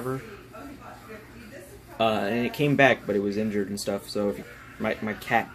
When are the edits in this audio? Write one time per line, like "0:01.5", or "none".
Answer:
0:04.4